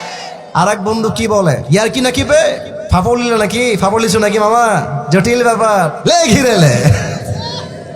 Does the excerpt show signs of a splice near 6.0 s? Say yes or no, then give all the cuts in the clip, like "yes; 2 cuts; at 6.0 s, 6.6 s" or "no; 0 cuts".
yes; 3 cuts; at 1.6 s, 2.7 s, 6.0 s